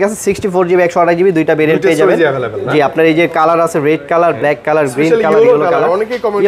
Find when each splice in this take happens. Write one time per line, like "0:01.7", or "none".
none